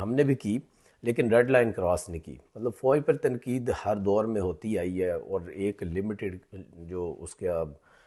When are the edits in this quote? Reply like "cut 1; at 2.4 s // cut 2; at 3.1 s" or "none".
none